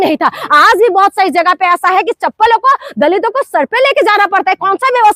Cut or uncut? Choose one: uncut